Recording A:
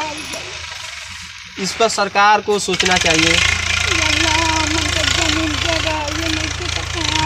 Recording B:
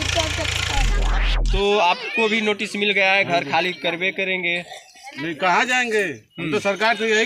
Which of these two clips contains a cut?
B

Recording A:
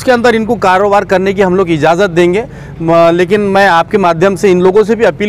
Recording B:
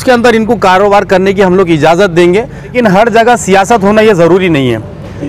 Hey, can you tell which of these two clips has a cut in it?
B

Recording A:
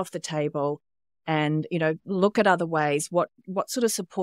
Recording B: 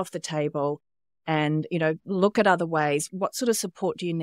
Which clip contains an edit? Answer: B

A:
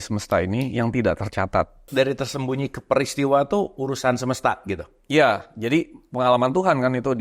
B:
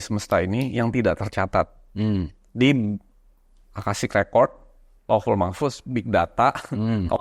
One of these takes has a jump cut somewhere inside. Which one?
A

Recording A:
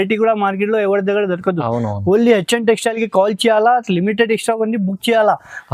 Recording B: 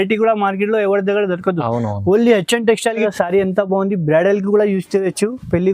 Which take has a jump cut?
B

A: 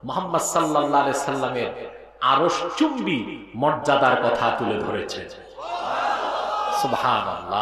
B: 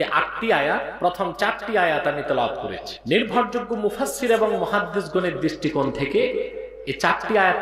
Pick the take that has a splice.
B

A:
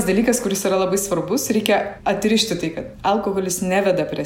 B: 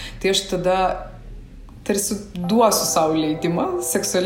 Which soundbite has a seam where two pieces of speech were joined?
A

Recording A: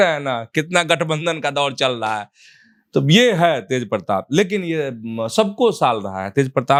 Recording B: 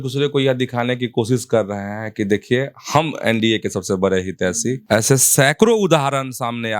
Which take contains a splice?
B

